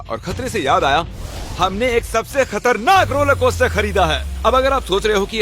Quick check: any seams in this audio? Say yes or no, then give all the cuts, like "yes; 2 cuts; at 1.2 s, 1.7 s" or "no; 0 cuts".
no; 0 cuts